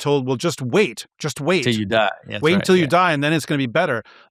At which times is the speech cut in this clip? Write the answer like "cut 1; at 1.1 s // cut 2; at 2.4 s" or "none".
none